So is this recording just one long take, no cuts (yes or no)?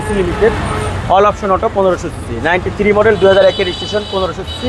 yes